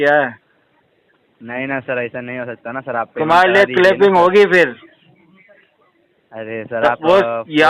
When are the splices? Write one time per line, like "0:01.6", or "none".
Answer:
none